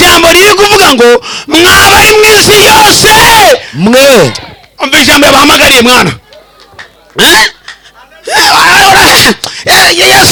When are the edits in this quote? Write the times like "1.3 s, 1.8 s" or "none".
none